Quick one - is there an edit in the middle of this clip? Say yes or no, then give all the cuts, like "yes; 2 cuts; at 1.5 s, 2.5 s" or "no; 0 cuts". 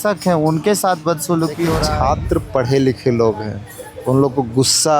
yes; 1 cut; at 1.9 s